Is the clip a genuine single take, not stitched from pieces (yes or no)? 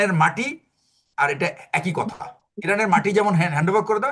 yes